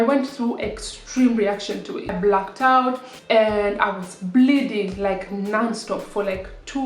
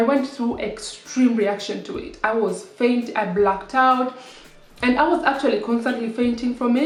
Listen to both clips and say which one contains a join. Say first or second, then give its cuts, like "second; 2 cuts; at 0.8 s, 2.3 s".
first; 2 cuts; at 2.1 s, 3.1 s